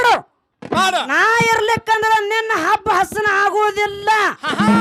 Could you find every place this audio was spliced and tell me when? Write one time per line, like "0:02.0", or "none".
0:01.1